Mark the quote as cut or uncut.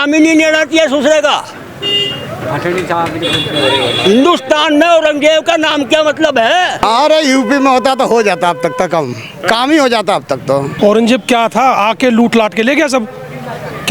cut